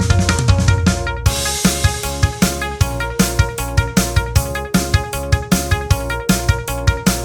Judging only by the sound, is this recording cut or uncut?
uncut